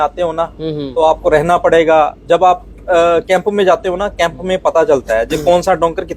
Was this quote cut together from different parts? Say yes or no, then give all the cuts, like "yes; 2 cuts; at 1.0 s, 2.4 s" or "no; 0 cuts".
no; 0 cuts